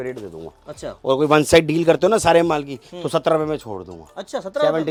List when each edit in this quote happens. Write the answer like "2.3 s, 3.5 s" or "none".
none